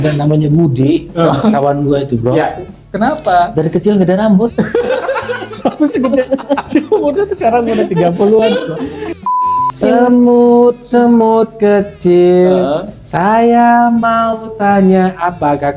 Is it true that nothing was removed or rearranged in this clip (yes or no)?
no